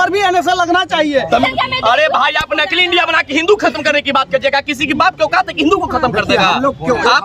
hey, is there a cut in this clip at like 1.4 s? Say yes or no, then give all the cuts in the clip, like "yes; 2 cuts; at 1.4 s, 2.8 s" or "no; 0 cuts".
yes; 1 cut; at 1.4 s